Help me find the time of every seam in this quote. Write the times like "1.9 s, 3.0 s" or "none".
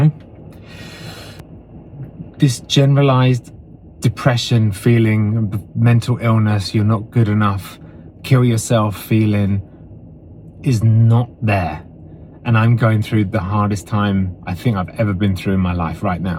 1.4 s